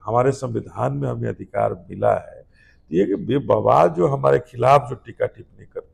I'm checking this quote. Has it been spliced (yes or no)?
no